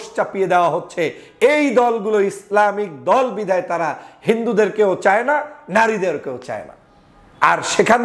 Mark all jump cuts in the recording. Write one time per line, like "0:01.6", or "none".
none